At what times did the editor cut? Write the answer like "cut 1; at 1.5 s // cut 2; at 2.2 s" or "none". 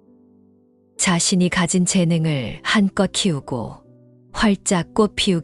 cut 1; at 1.0 s